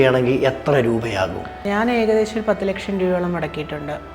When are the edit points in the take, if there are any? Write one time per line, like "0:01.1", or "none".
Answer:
0:01.5